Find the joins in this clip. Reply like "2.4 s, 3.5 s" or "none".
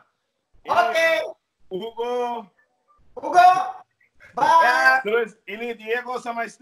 none